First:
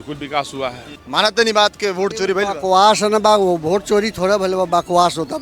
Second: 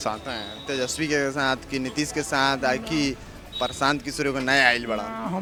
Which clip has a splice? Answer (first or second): first